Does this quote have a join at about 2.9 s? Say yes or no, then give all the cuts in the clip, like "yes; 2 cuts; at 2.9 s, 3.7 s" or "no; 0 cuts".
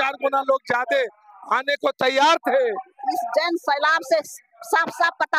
yes; 1 cut; at 2.9 s